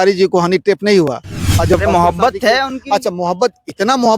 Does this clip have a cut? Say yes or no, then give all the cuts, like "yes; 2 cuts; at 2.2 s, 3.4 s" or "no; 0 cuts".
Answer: yes; 1 cut; at 1.8 s